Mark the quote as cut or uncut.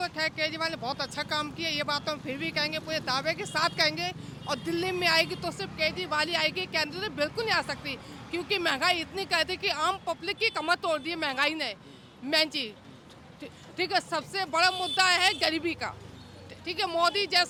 uncut